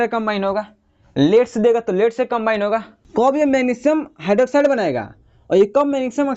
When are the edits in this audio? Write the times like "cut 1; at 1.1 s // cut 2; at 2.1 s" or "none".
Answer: cut 1; at 3.0 s